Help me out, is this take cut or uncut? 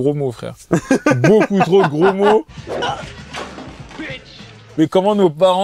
uncut